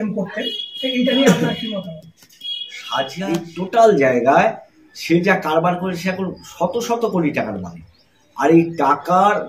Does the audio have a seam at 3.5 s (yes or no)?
yes